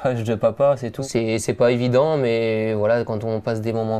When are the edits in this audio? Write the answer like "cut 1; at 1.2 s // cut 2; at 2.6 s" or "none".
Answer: cut 1; at 0.9 s